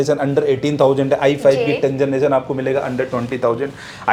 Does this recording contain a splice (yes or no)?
no